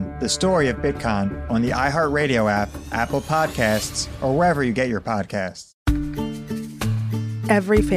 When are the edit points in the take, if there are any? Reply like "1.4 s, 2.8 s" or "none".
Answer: 5.7 s